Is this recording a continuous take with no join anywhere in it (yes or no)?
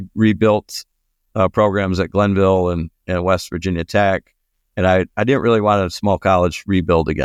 yes